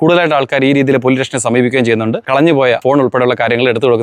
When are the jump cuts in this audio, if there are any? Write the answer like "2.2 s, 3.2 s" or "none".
2.4 s

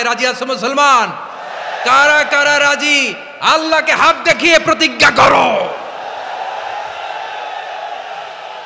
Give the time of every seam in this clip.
none

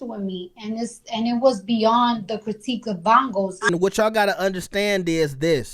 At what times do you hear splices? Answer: 3.7 s

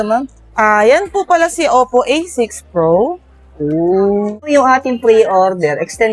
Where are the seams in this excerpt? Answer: 4.4 s

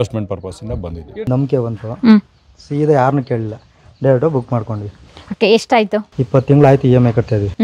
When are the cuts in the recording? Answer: 1.3 s

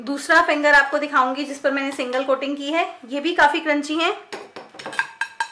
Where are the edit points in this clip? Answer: none

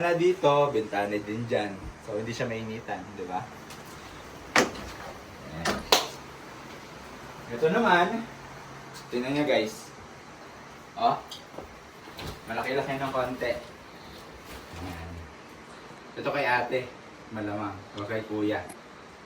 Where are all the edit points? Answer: 5.5 s

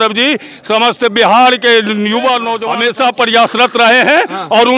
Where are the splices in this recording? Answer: 2.6 s

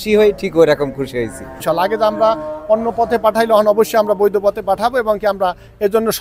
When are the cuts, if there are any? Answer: 1.6 s

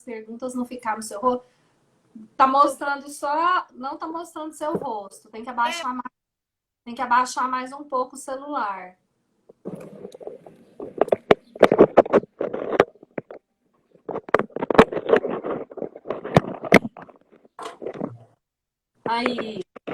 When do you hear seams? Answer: 15.0 s

